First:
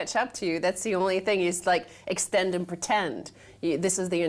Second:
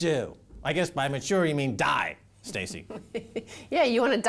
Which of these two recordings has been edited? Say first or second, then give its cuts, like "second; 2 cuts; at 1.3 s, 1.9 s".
first; 1 cut; at 2.6 s